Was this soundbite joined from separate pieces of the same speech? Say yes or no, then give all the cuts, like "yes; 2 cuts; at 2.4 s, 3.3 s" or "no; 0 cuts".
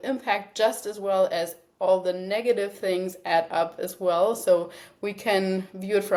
no; 0 cuts